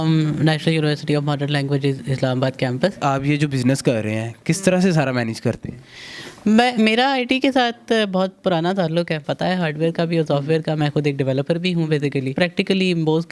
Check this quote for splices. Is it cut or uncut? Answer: cut